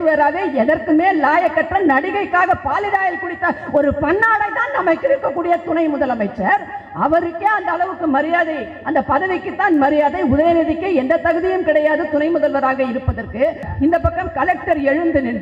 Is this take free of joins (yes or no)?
no